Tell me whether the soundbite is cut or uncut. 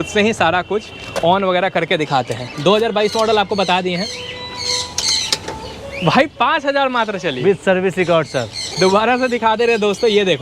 uncut